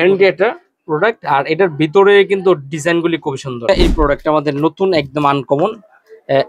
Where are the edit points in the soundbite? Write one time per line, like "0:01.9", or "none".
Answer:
0:03.7